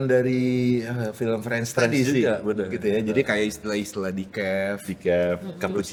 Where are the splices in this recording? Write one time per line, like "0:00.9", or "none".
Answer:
none